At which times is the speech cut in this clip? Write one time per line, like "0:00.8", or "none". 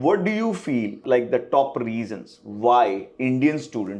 0:01.0